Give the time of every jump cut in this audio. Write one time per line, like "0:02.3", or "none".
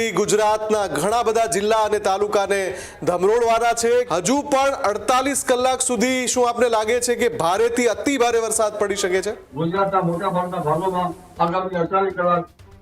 0:04.1
0:09.4